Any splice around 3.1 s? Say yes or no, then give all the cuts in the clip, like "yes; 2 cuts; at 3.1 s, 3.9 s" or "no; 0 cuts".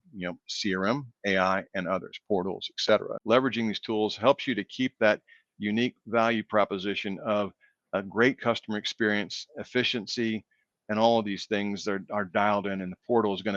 yes; 1 cut; at 3.1 s